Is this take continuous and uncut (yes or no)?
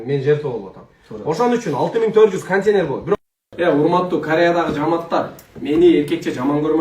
no